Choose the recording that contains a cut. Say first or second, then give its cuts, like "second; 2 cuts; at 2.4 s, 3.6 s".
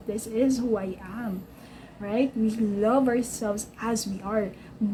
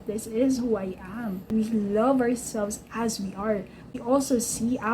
second; 2 cuts; at 1.5 s, 3.9 s